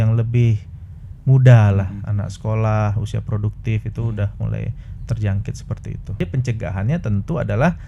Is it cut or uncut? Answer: cut